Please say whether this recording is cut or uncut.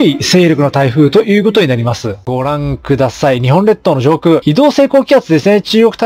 cut